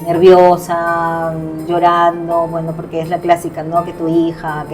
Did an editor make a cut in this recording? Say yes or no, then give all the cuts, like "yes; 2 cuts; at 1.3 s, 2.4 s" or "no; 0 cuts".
no; 0 cuts